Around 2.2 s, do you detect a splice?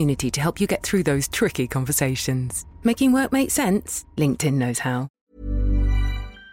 no; 1 cut; at 5.2 s

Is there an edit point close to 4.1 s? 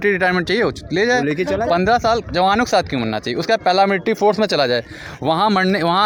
no; 0 cuts

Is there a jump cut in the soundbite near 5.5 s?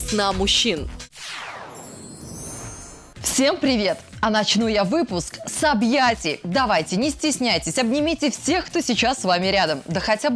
no; 2 cuts; at 1.0 s, 3.0 s

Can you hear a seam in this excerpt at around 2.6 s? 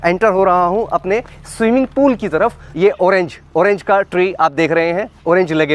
yes; 1 cut; at 2.6 s

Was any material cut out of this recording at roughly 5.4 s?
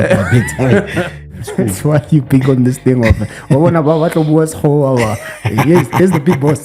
no; 1 cut; at 1.3 s

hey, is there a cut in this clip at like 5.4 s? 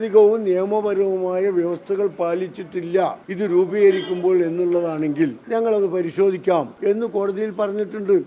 yes; 3 cuts; at 3.2 s, 5.4 s, 6.7 s

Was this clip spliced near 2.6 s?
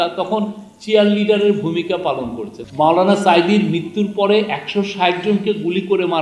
yes; 1 cut; at 2.6 s

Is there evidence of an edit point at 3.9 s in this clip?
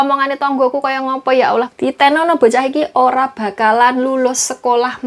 no; 1 cut; at 1.7 s

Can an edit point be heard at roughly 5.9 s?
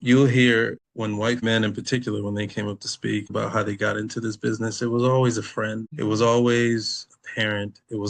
yes; 3 cuts; at 1.4 s, 3.3 s, 5.9 s

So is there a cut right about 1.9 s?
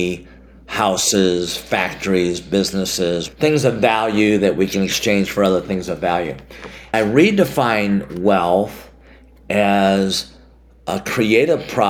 no; 2 cuts; at 3.2 s, 6.9 s

